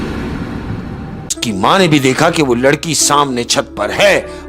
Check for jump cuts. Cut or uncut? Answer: cut